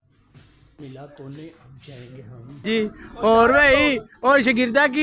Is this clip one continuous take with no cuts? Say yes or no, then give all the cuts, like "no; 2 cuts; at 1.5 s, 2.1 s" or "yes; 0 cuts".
no; 2 cuts; at 0.8 s, 2.6 s